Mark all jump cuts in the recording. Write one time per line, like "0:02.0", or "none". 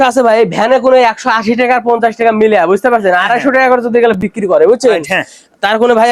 none